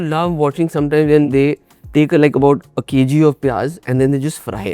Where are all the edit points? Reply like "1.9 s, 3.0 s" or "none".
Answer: 1.3 s